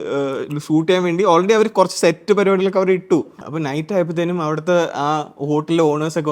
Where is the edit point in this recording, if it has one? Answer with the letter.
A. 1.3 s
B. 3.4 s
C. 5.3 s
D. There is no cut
B